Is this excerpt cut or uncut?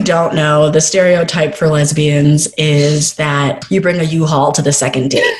uncut